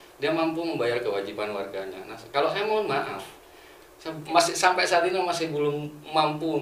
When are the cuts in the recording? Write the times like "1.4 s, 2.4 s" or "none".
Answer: none